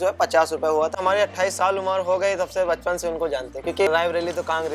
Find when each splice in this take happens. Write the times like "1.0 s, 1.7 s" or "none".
1.0 s, 3.9 s